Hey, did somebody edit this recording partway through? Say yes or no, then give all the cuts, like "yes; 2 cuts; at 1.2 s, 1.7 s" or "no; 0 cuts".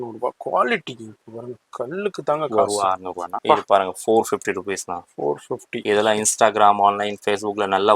yes; 1 cut; at 3.3 s